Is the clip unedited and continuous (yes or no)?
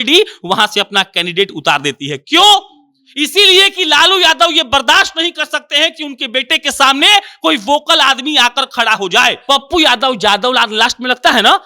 no